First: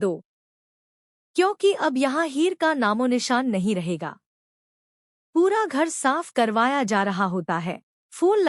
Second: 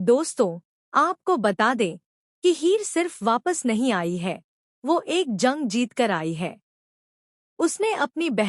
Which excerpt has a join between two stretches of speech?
first; 1 cut; at 1.8 s

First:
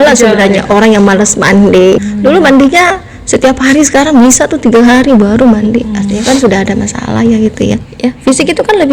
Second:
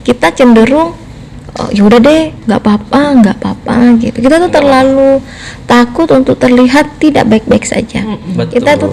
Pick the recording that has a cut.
first; 2 cuts; at 2.0 s, 7.9 s

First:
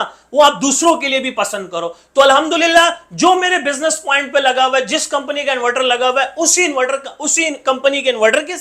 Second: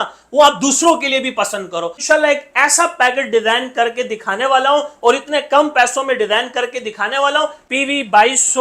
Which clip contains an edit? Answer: second; 2 cuts; at 2.0 s, 7.6 s

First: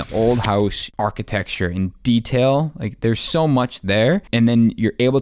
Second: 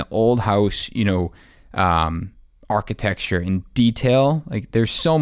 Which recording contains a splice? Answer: first; 2 cuts; at 0.8 s, 4.3 s

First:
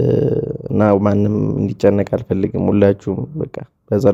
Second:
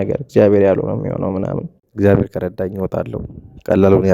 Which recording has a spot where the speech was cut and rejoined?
second; 1 cut; at 1.8 s

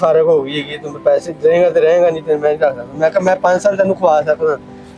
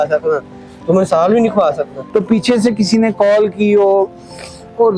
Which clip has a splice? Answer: second; 1 cut; at 1.9 s

